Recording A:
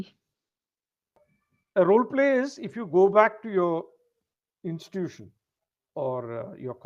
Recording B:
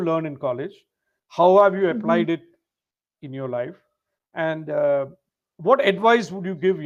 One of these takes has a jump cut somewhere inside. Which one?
A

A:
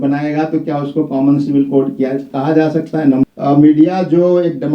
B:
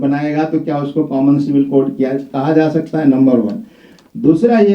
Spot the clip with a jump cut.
A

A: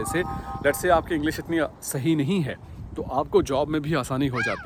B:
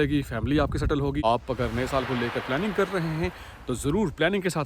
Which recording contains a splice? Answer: B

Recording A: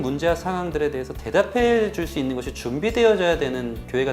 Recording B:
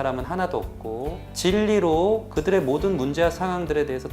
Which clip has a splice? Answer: B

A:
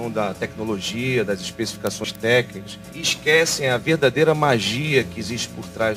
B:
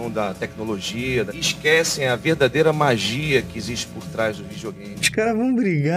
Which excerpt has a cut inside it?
B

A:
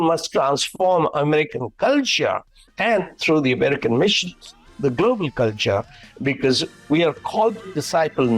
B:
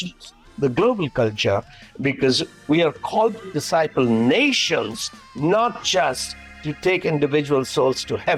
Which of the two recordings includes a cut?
A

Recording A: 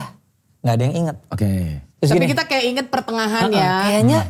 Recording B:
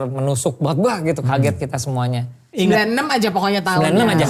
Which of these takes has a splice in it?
B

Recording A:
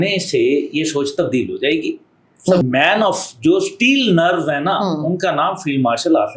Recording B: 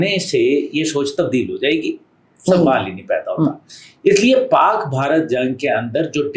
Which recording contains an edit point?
A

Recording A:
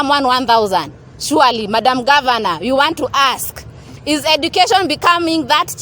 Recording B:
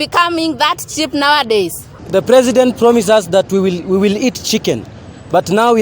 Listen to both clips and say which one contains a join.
B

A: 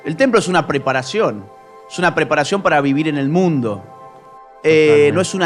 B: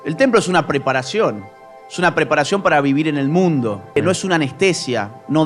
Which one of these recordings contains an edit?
B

